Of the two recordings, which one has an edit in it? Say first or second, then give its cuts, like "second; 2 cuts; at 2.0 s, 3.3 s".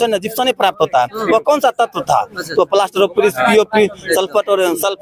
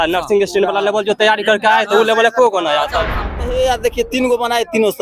second; 1 cut; at 3.2 s